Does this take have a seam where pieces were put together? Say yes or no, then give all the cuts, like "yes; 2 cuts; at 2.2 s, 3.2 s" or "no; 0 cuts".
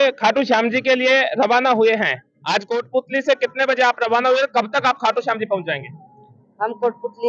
no; 0 cuts